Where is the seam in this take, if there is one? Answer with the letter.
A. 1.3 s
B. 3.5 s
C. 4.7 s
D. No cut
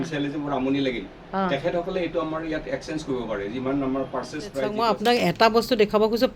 C